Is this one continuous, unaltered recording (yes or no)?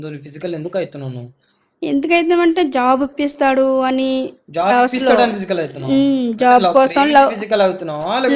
yes